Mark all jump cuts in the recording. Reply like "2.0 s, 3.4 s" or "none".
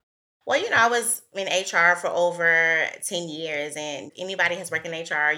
4.1 s

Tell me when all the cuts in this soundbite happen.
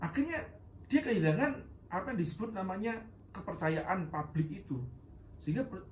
3.1 s

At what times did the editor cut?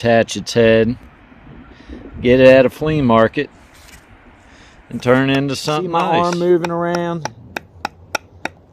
5.8 s

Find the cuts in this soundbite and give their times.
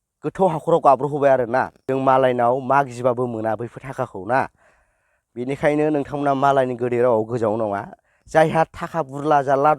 1.8 s

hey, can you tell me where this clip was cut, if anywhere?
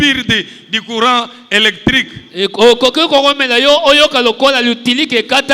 none

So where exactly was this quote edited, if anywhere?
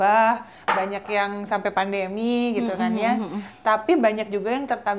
none

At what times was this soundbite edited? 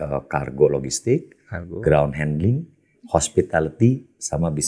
none

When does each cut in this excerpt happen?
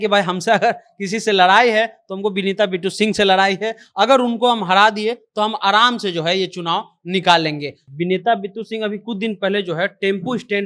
7.8 s

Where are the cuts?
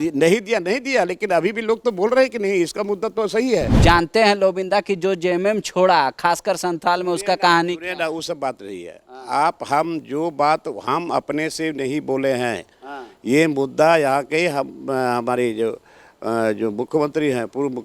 3.7 s

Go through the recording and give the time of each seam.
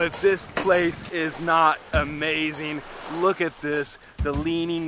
none

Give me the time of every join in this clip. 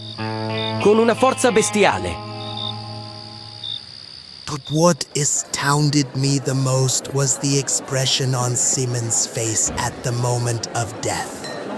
4.3 s

